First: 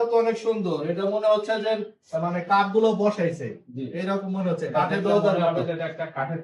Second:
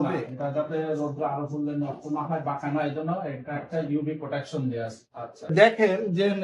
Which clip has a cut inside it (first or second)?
second